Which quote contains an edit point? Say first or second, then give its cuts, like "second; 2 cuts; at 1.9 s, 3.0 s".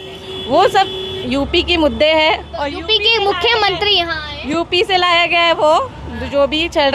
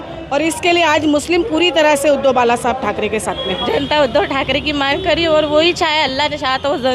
second; 1 cut; at 3.5 s